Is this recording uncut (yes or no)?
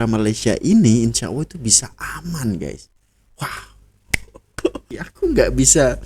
no